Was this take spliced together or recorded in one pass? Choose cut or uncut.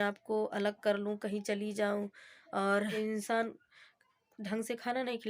cut